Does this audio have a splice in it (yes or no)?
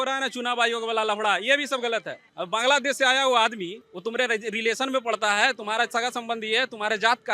yes